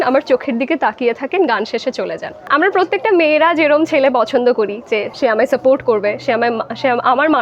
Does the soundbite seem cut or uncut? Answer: cut